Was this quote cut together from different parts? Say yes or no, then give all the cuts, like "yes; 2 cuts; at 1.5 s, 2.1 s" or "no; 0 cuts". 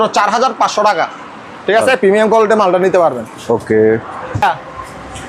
no; 0 cuts